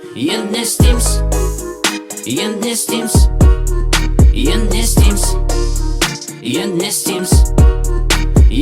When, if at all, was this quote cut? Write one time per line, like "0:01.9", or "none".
none